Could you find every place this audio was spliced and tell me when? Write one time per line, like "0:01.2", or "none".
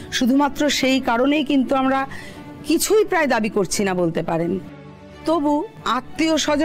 0:05.8